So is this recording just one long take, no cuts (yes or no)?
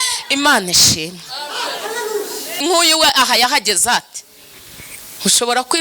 no